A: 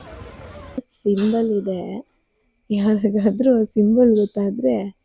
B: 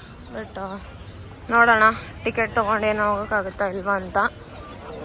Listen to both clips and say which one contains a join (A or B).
A